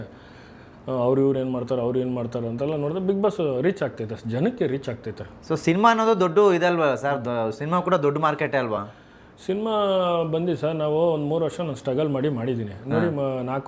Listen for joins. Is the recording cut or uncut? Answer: uncut